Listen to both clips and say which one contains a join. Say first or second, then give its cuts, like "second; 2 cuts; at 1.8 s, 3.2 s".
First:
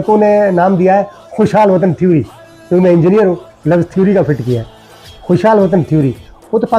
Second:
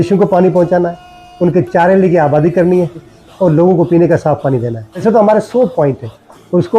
second; 2 cuts; at 3.1 s, 5.0 s